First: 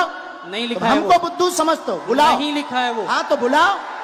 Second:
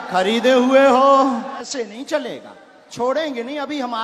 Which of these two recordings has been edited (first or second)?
second